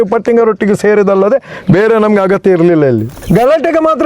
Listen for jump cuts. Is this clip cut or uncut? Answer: cut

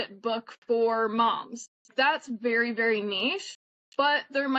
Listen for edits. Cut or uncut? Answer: uncut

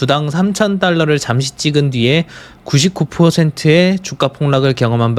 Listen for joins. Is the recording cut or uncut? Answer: uncut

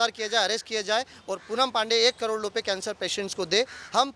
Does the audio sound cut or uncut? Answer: uncut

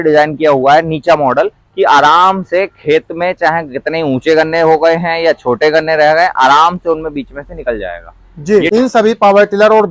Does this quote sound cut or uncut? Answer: cut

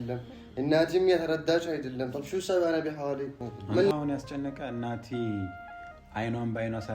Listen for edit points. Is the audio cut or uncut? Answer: cut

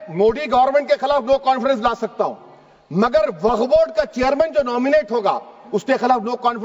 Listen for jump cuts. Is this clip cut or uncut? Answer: uncut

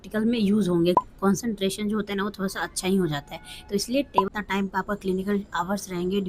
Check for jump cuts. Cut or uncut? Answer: cut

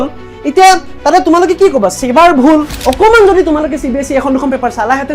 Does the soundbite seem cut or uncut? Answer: cut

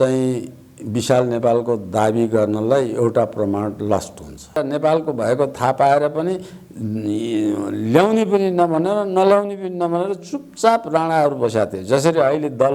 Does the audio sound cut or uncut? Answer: cut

